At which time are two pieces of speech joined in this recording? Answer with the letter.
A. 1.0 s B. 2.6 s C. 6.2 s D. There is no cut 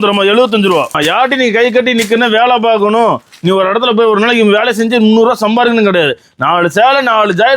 A